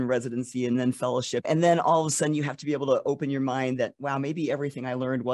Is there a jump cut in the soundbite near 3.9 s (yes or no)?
no